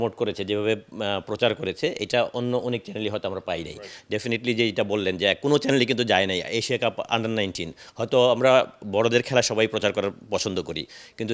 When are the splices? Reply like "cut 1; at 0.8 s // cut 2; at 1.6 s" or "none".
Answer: none